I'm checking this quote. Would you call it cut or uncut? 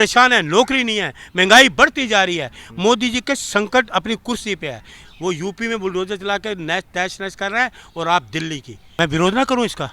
cut